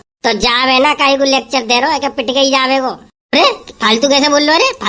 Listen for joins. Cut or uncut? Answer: uncut